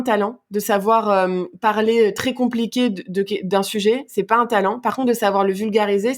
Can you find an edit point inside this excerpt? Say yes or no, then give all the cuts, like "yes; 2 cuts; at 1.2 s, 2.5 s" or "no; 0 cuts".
no; 0 cuts